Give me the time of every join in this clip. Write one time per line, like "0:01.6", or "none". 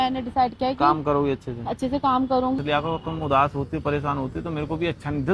0:02.6

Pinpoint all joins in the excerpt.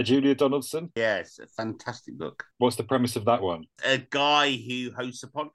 0:00.9
0:02.5
0:03.6

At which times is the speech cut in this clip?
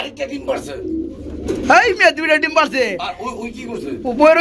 none

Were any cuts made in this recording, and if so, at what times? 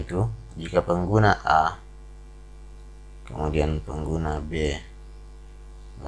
none

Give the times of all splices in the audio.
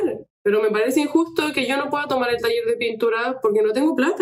none

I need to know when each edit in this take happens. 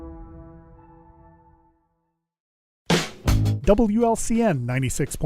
0:02.7

